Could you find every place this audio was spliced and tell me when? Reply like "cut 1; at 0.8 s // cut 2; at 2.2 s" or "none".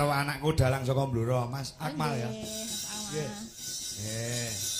none